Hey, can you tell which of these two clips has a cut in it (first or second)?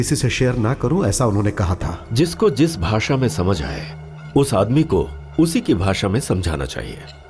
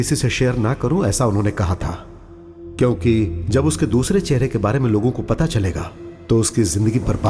first